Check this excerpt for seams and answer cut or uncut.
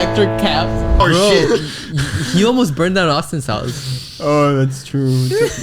cut